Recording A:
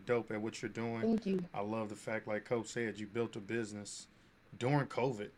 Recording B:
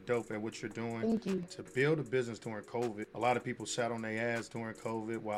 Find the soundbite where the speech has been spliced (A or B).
B